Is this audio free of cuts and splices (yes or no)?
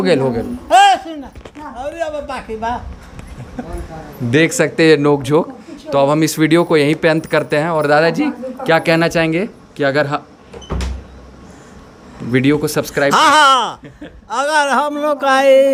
yes